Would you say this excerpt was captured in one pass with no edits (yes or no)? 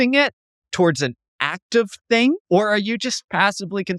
no